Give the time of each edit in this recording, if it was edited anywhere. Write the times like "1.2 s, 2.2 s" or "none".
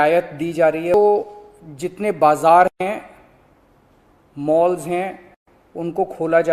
0.9 s